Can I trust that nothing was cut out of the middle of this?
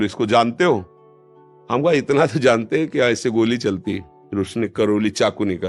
yes; 0 cuts

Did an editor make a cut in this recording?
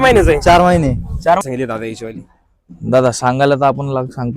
yes; 1 cut; at 1.4 s

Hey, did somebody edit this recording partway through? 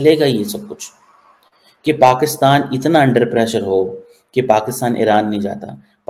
no; 0 cuts

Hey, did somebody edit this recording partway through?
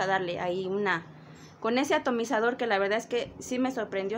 no; 0 cuts

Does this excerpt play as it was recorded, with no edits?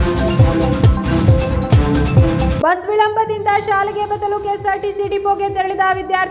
no; 1 cut; at 2.5 s

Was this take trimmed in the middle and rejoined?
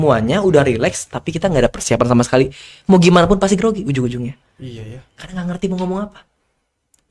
no; 0 cuts

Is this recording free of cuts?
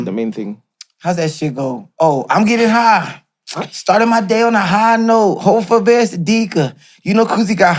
yes; 0 cuts

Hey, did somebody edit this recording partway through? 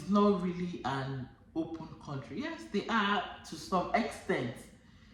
no; 0 cuts

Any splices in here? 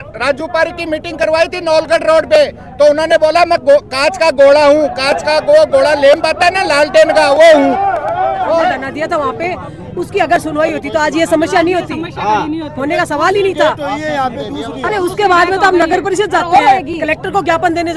yes; 1 cut; at 8.9 s

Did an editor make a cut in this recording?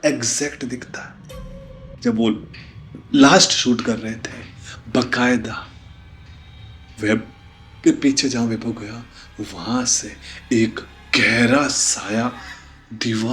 yes; 1 cut; at 1.8 s

